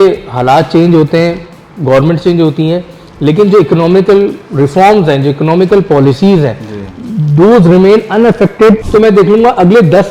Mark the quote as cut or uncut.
cut